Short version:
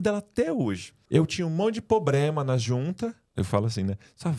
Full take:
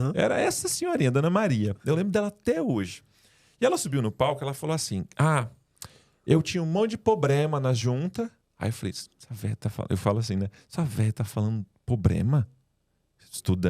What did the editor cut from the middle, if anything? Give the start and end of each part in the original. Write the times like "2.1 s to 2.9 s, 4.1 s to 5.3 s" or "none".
3.0 s to 6.1 s, 8.4 s to 9.8 s